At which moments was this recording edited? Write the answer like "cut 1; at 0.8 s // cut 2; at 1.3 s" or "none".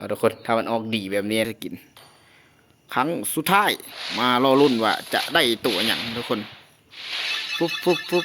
cut 1; at 1.5 s